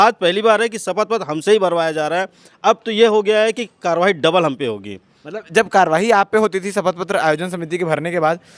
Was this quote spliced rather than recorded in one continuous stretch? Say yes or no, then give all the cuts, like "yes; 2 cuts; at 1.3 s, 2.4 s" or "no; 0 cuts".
no; 0 cuts